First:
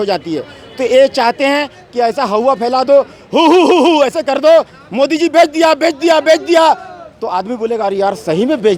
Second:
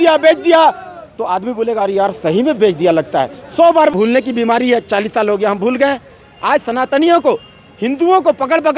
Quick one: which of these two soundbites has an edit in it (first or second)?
second